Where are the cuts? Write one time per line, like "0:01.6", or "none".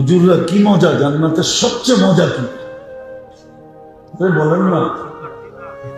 none